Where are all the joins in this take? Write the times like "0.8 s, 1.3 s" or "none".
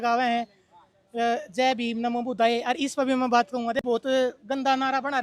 3.8 s